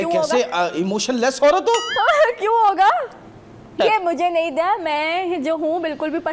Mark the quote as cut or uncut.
cut